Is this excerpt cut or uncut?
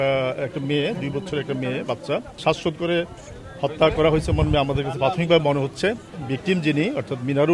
cut